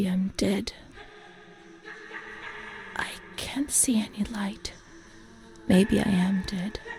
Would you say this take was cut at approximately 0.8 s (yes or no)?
no